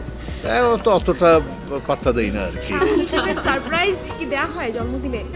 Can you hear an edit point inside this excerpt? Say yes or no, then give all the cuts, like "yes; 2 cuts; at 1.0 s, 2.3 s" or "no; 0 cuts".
no; 0 cuts